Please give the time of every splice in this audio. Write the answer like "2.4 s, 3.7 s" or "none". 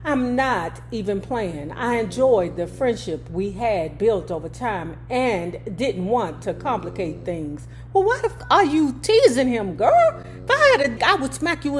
8.3 s, 11.0 s